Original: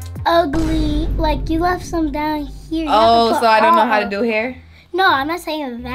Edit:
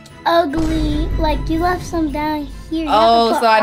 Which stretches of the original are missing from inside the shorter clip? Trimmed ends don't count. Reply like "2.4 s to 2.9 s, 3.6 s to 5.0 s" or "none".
none